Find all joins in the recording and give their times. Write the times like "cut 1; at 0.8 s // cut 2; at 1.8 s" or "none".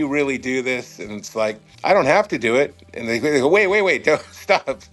cut 1; at 1.7 s